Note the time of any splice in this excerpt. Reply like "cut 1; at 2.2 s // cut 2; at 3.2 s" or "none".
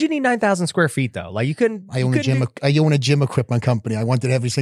none